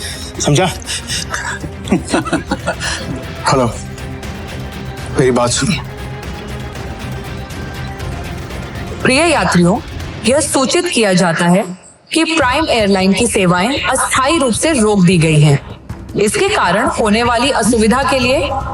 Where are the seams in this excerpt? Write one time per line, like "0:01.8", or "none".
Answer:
0:02.9
0:06.7